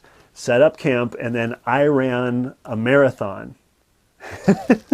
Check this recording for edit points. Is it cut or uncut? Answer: uncut